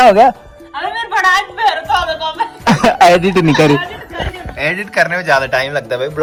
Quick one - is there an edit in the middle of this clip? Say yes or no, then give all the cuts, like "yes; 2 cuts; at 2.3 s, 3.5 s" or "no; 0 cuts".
no; 0 cuts